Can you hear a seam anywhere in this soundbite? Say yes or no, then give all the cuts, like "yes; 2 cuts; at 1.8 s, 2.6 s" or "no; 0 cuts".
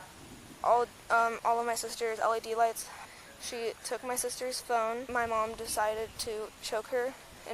yes; 2 cuts; at 3.0 s, 5.0 s